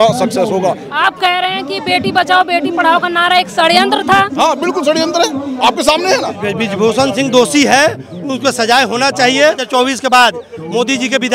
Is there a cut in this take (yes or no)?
yes